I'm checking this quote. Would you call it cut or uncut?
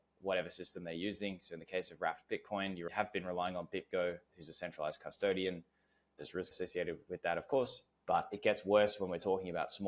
uncut